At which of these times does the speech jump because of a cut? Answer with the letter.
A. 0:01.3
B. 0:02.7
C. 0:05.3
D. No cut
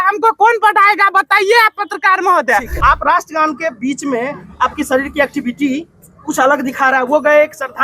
B